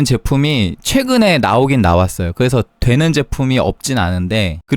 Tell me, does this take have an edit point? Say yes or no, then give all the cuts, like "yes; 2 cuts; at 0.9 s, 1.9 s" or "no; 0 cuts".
no; 0 cuts